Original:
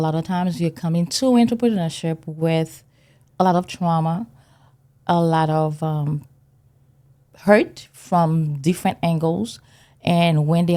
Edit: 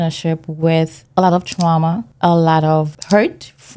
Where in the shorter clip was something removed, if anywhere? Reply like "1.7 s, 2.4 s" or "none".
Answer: 1.0 s, 2.1 s, 2.9 s